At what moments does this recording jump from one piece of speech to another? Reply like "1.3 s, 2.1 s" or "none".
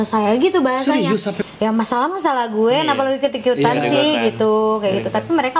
1.4 s